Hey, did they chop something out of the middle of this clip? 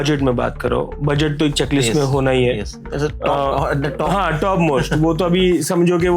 no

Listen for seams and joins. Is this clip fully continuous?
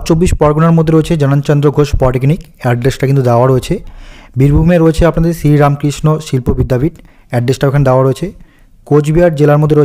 yes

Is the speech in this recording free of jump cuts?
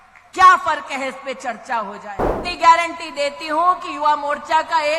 no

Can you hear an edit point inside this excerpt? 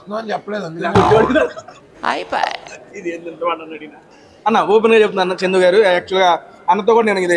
no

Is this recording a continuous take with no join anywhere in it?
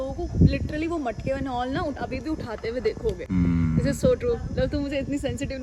yes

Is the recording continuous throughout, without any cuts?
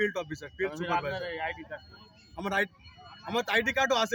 yes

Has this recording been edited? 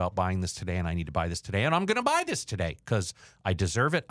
no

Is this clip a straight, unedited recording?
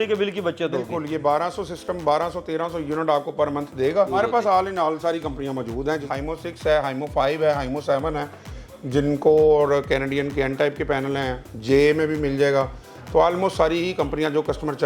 no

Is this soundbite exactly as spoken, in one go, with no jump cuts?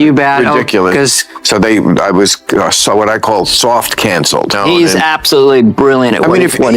no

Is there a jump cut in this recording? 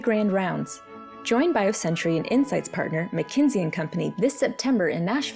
no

